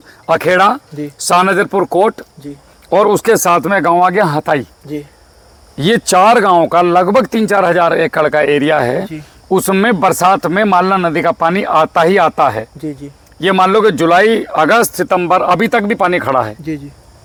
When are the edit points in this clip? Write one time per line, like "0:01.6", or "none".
none